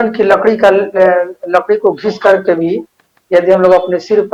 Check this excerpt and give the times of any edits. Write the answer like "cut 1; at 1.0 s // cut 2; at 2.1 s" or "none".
none

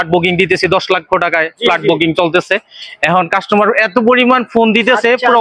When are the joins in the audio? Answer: none

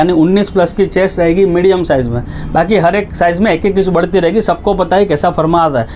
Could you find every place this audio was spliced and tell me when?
none

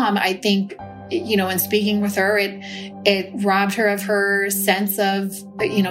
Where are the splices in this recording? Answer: none

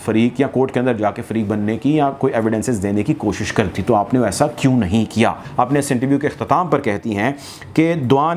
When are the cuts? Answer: cut 1; at 5.4 s

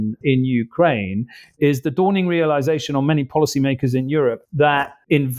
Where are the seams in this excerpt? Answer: cut 1; at 4.4 s

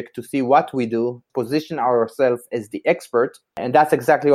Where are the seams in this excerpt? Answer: cut 1; at 1.2 s

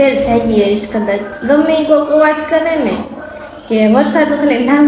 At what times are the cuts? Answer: none

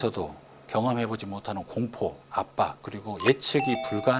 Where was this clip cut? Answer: none

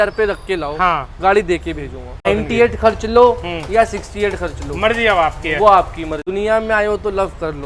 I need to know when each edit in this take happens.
cut 1; at 2.2 s // cut 2; at 6.1 s

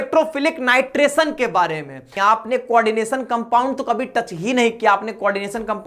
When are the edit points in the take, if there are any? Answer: cut 1; at 2.1 s

